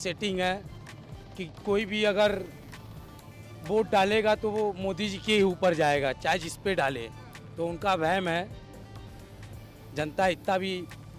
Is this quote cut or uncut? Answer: uncut